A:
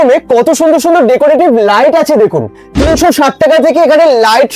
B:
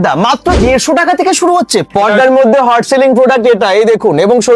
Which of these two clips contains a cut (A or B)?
B